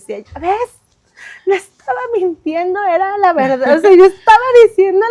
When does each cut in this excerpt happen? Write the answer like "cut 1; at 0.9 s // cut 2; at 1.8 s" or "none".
none

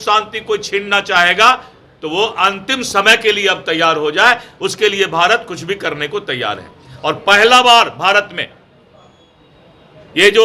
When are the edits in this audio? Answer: none

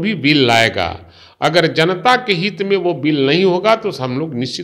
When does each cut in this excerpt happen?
none

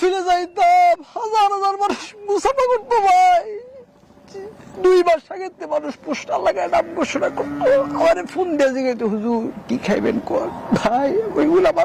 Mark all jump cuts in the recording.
none

